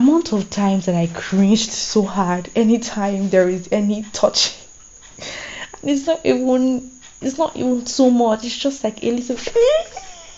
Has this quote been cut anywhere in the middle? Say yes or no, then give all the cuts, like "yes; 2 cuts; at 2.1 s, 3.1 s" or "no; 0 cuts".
yes; 1 cut; at 9.2 s